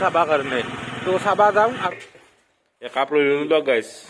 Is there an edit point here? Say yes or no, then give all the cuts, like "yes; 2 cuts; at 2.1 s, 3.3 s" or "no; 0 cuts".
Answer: yes; 1 cut; at 1.8 s